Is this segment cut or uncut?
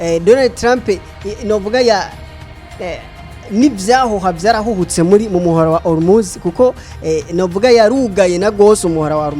uncut